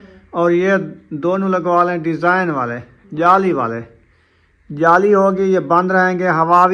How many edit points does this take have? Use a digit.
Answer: 0